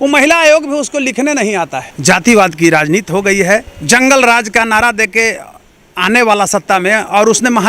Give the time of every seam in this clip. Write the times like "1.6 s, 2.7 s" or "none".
1.9 s, 3.7 s